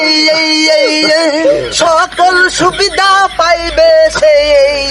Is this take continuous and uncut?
no; 1 cut; at 1.5 s

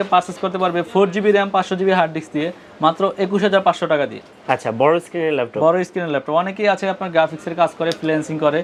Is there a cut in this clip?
no; 0 cuts

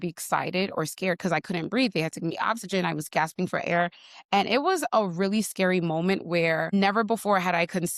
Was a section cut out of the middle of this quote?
yes; 1 cut; at 6.7 s

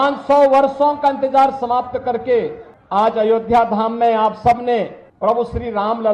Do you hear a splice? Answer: no; 0 cuts

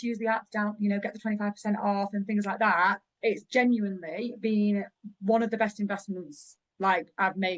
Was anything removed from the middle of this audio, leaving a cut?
no; 0 cuts

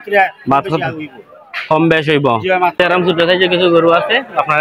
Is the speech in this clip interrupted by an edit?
yes; 1 cut; at 2.8 s

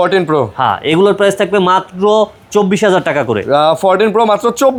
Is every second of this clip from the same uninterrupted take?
yes; 0 cuts

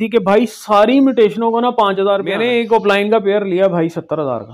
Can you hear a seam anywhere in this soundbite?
yes; 1 cut; at 2.4 s

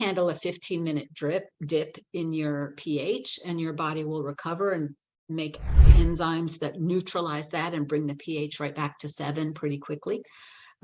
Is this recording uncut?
yes; 0 cuts

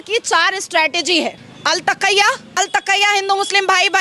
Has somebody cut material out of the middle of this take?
yes; 2 cuts; at 1.5 s, 2.5 s

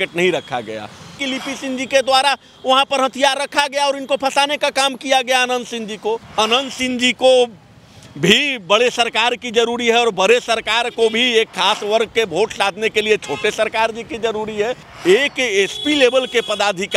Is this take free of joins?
no; 3 cuts; at 1.2 s, 6.3 s, 14.9 s

